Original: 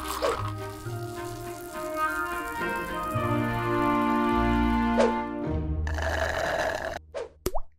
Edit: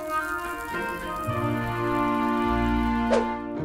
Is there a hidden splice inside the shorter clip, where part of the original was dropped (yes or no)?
no